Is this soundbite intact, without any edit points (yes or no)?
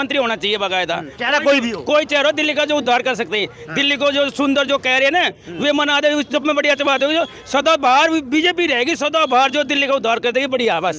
yes